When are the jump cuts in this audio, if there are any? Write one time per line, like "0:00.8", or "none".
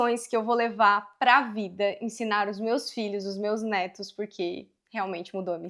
none